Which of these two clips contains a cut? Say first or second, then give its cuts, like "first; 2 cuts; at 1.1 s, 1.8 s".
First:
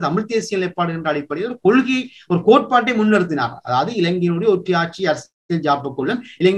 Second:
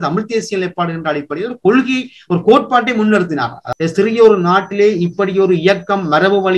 second; 1 cut; at 3.6 s